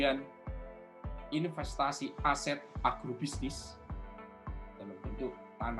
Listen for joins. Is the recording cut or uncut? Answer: uncut